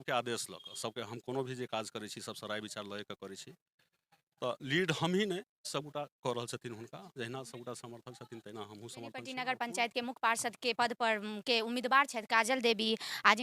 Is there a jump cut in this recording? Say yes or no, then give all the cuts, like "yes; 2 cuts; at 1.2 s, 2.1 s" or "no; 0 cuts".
yes; 1 cut; at 9.1 s